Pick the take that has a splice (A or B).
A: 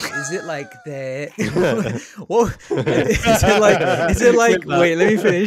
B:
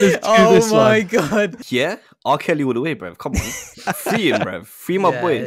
B